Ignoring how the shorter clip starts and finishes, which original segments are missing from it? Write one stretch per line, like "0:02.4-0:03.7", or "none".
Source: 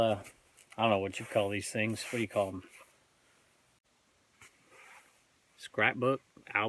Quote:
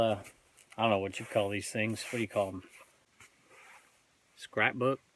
0:03.1-0:04.3